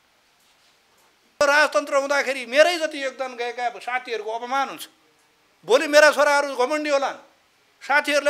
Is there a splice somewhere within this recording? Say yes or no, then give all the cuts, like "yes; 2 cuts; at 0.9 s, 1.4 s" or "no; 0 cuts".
yes; 1 cut; at 1.4 s